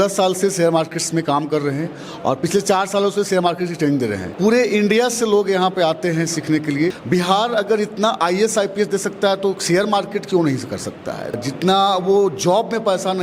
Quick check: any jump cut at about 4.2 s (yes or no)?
yes